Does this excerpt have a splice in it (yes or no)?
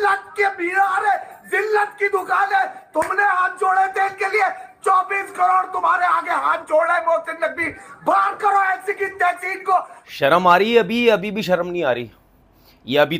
yes